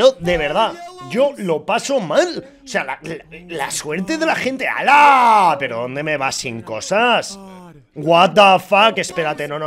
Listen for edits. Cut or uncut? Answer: uncut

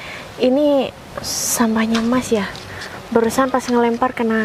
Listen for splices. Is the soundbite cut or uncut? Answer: uncut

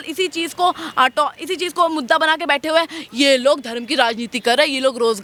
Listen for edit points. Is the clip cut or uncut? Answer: uncut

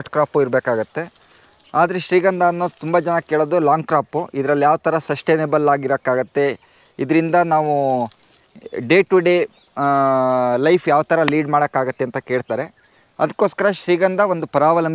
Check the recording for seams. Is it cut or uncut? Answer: uncut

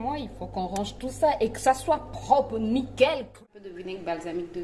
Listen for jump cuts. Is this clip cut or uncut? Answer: cut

